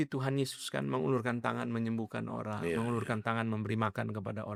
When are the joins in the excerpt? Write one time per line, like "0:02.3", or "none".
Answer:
none